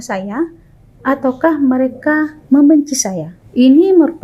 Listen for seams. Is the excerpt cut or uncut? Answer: uncut